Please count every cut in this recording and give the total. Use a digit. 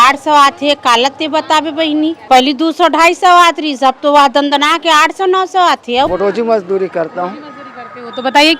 2